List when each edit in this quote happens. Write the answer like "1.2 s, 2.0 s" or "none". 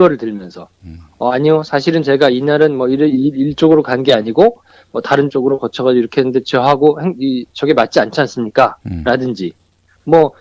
none